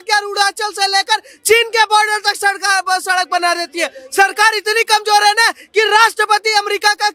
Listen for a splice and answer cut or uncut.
uncut